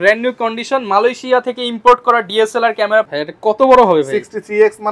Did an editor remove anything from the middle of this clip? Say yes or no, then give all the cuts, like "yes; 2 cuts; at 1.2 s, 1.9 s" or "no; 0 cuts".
yes; 1 cut; at 3.1 s